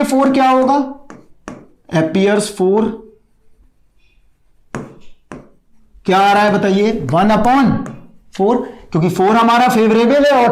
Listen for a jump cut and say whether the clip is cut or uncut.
uncut